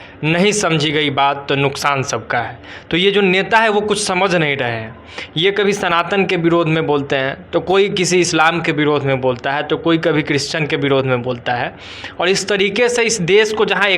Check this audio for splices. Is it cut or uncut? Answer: uncut